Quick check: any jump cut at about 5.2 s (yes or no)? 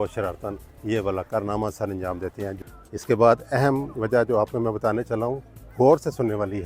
no